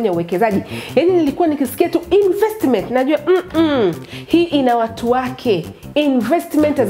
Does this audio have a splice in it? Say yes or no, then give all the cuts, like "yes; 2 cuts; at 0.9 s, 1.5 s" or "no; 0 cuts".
no; 0 cuts